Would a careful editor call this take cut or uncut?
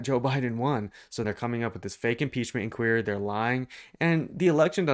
cut